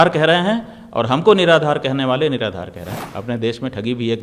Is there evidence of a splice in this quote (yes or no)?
yes